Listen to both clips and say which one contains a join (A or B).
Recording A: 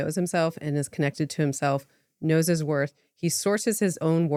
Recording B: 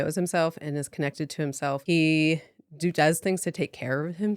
B